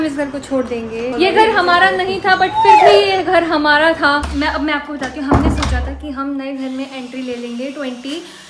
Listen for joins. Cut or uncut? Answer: cut